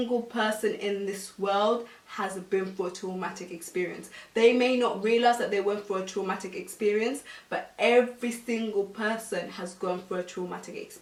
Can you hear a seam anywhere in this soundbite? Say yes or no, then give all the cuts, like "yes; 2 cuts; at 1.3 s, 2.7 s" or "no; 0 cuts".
no; 0 cuts